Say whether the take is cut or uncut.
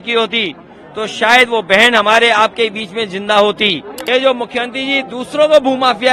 cut